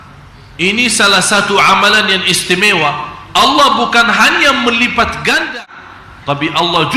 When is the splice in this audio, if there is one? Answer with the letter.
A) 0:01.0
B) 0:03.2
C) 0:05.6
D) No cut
C